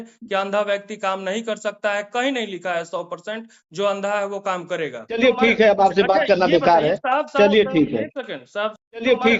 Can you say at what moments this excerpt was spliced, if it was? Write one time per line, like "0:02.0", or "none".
none